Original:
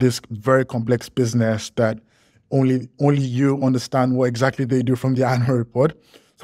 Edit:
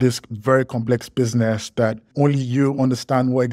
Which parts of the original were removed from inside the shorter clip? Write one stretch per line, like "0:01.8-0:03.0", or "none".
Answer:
0:02.1-0:02.9

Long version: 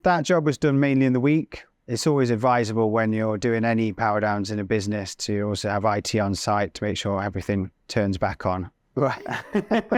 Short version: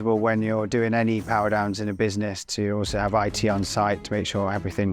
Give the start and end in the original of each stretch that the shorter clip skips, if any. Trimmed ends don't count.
none

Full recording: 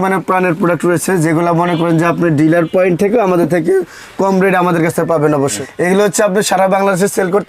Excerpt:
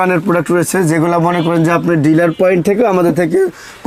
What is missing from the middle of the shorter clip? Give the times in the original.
none

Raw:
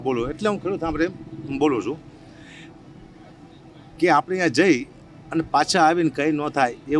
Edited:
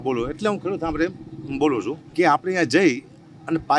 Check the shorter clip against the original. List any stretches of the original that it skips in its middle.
0:02.0-0:03.9

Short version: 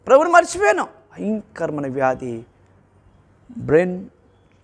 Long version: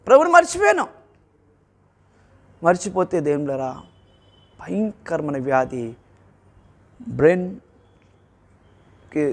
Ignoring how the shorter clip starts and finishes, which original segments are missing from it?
0:01.0-0:04.5

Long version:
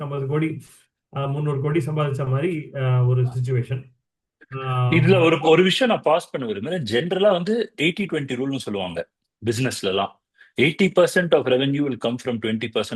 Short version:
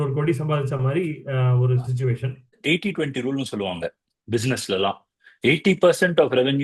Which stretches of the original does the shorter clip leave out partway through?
0:04.1-0:07.7

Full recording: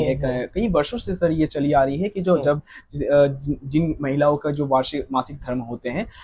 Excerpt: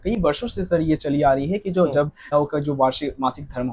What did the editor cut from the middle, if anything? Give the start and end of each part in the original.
0:02.8-0:04.3

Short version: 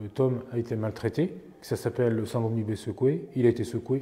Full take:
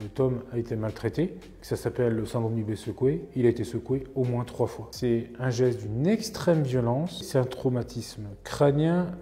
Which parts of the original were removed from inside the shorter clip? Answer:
none

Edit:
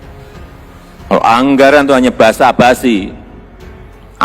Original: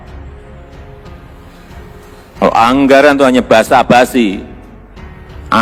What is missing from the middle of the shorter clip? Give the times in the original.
0:01.8-0:02.4

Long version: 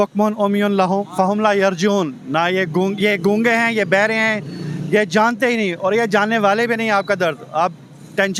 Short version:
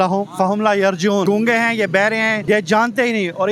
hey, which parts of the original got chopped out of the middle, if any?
0:02.0-0:03.2
0:04.4-0:04.8

